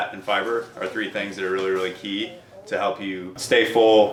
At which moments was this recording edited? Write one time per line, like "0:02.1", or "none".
none